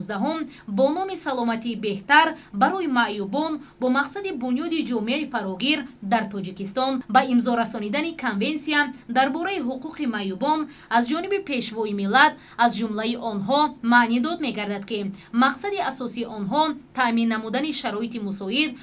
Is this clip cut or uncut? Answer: cut